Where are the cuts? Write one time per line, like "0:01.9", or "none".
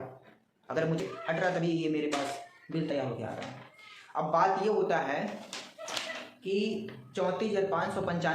0:01.0